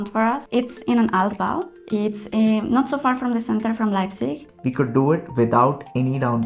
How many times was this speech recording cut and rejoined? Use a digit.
1